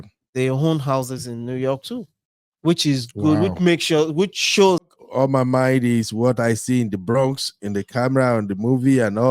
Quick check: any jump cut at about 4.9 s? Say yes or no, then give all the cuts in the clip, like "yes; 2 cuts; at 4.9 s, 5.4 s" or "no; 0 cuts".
yes; 1 cut; at 4.9 s